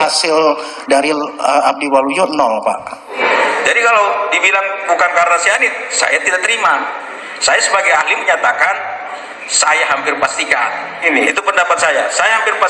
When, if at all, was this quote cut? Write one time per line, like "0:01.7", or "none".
0:03.2
0:11.0